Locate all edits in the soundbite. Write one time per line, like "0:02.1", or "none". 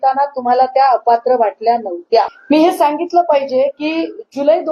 0:02.4